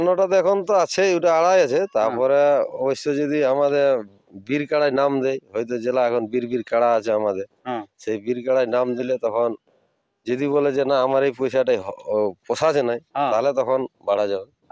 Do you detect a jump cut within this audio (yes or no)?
no